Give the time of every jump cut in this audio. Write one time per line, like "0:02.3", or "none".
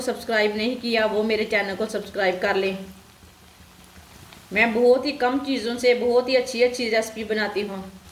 none